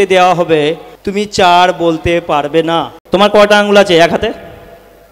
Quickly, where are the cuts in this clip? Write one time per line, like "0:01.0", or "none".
0:00.9
0:02.9